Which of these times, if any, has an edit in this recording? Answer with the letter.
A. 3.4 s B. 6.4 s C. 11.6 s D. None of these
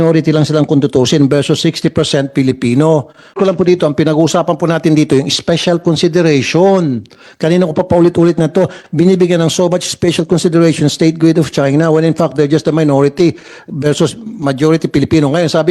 A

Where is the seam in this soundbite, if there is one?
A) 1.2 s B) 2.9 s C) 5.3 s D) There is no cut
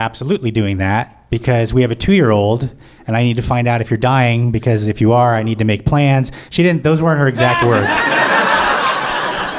A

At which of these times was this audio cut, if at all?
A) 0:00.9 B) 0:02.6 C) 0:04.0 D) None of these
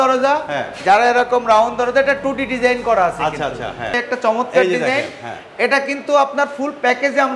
C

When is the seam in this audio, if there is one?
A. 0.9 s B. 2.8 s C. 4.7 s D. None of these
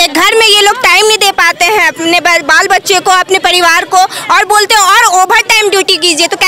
D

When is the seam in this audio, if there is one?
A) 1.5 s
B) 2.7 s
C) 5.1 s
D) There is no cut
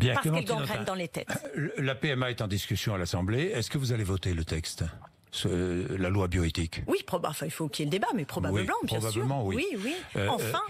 A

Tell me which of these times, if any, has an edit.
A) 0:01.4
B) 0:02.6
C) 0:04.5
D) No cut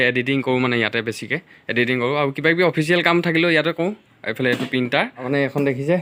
D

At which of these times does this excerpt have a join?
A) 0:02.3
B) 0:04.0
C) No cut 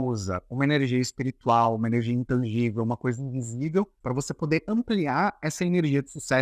B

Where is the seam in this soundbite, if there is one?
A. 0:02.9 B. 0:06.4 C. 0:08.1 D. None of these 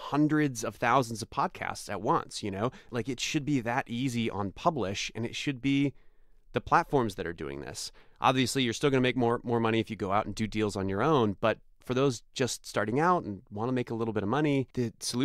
A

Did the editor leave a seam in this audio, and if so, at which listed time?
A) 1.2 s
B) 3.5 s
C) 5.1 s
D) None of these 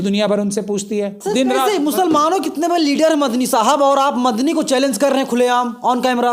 A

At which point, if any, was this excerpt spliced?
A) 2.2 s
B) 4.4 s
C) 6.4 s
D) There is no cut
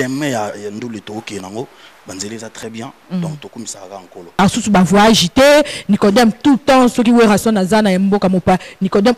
B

